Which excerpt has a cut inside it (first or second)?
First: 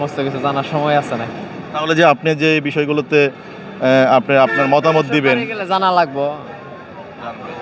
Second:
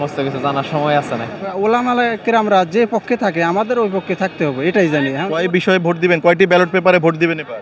second